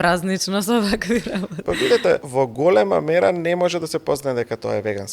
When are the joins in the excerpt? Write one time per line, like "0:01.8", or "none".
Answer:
0:01.5
0:02.3